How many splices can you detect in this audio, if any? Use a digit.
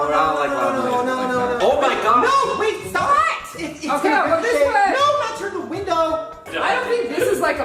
2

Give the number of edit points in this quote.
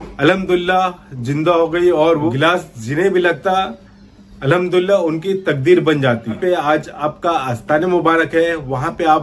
2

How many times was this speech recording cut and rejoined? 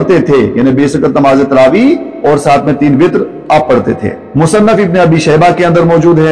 1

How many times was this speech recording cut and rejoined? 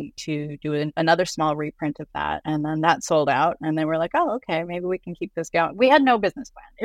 2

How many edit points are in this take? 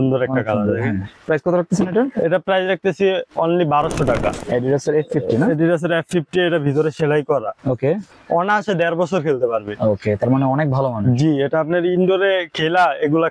3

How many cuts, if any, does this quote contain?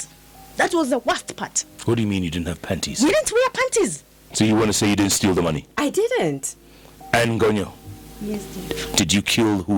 1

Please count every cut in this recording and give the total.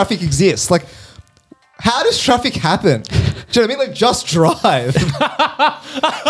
0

